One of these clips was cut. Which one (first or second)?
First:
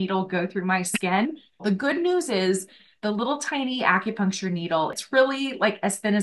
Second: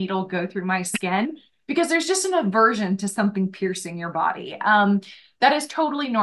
first